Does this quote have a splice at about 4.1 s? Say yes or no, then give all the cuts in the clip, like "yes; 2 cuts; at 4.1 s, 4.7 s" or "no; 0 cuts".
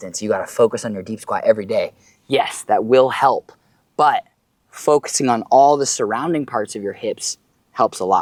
no; 0 cuts